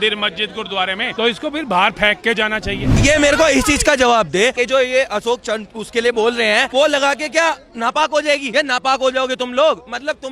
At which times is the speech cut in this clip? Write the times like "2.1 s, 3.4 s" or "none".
1.1 s, 2.9 s, 4.5 s, 6.7 s, 8.4 s